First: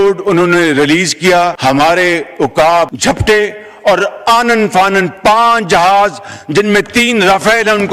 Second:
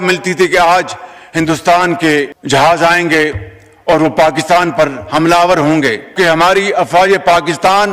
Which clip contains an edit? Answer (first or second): first